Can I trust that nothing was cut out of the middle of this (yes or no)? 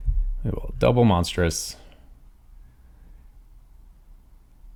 yes